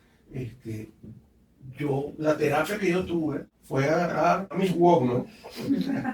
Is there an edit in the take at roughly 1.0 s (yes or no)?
no